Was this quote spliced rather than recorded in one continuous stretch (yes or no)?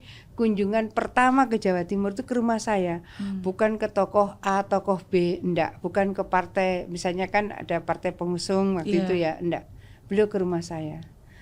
no